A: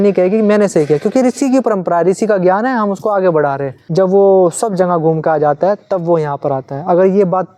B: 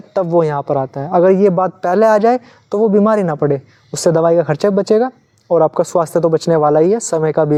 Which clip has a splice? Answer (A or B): A